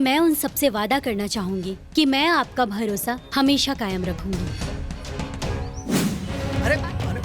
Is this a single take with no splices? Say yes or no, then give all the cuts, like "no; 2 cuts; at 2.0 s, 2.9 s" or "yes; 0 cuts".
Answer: no; 1 cut; at 6.3 s